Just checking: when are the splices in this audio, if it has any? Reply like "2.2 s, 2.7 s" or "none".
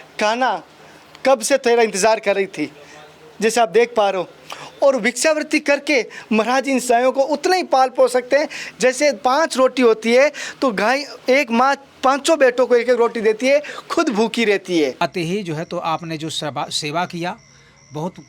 15.0 s